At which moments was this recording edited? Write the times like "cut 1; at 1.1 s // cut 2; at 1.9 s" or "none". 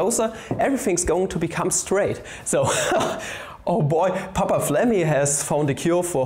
none